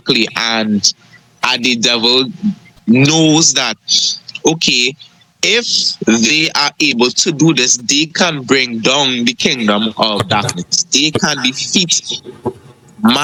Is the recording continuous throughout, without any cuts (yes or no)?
yes